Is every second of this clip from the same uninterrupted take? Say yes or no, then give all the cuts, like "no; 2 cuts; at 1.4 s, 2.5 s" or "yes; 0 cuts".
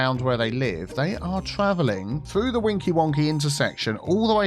no; 1 cut; at 2.2 s